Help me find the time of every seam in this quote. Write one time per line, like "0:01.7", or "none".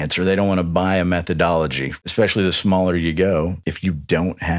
0:01.9
0:03.6